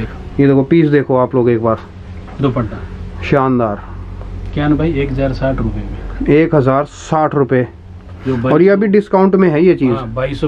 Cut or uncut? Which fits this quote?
uncut